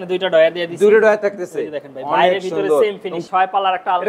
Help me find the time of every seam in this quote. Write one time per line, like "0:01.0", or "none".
0:03.2

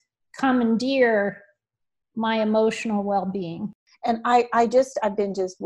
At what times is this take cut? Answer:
0:03.6

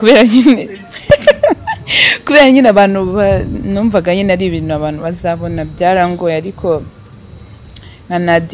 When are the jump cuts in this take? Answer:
none

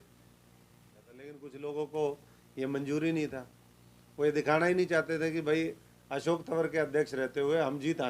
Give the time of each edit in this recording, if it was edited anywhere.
0:01.4

